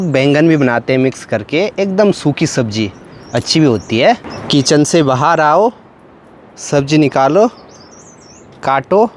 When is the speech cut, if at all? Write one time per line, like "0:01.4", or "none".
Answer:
none